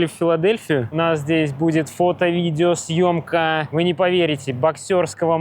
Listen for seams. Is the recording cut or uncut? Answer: cut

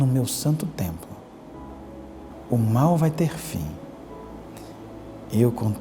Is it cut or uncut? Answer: cut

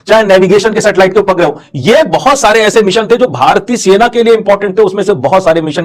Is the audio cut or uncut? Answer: uncut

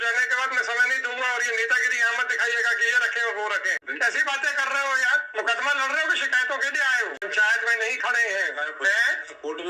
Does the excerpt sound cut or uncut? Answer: cut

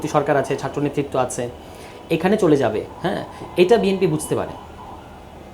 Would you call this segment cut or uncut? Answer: uncut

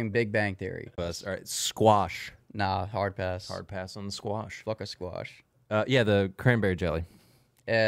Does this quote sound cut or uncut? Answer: cut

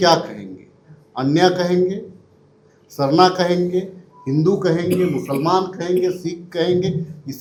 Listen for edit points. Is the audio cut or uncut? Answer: uncut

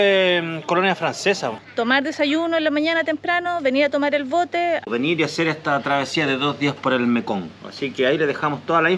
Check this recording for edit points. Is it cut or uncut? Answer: cut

